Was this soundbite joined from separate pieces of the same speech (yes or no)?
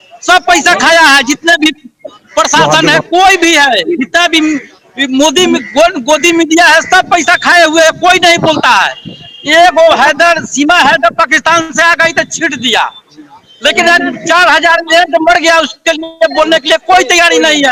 no